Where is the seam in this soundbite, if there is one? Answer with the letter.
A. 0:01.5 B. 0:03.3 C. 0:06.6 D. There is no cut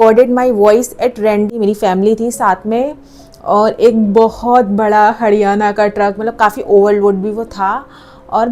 A